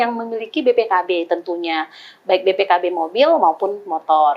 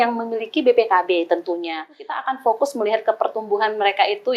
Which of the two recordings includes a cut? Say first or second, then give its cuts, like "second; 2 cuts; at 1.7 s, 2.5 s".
second; 1 cut; at 2.2 s